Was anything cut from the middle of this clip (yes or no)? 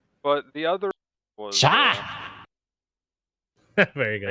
yes